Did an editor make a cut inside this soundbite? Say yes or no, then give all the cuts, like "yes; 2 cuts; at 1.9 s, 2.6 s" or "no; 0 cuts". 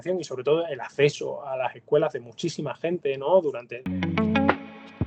yes; 1 cut; at 3.7 s